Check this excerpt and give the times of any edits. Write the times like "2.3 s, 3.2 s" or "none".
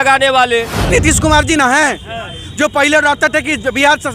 0.9 s